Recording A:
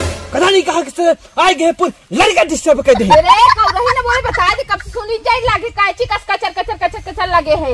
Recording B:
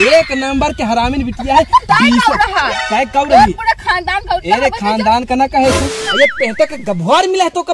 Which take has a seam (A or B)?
B